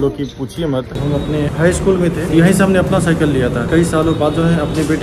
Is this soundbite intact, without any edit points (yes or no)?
no